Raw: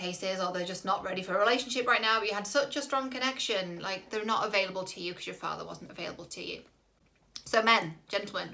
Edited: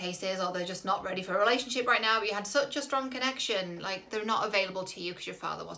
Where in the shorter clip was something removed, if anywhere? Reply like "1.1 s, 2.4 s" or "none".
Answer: none